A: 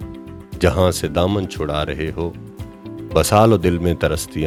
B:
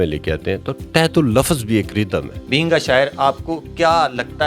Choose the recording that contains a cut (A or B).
B